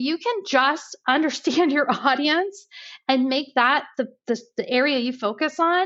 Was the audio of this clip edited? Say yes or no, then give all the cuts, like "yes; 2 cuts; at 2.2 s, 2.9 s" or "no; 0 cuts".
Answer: yes; 1 cut; at 0.9 s